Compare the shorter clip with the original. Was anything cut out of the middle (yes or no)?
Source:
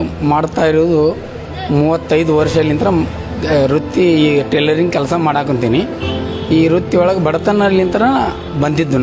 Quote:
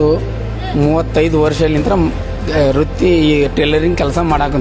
no